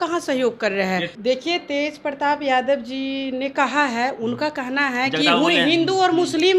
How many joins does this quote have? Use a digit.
1